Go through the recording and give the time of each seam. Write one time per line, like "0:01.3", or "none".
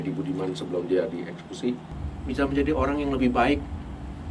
0:01.9